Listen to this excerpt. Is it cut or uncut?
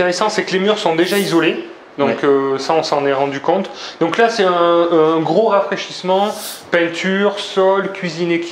uncut